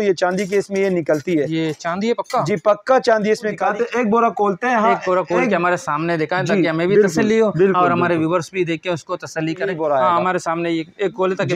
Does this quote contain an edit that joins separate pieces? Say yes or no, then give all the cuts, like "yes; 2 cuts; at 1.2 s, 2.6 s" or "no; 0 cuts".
yes; 2 cuts; at 3.6 s, 9.7 s